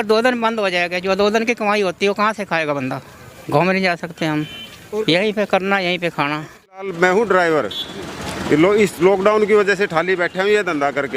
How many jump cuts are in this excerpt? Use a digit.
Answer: 2